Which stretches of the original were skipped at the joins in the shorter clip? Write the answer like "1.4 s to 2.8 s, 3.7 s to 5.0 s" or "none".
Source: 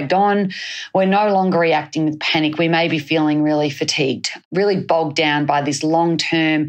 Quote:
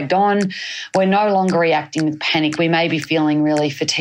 none